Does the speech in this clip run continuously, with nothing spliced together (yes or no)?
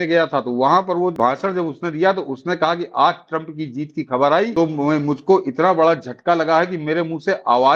no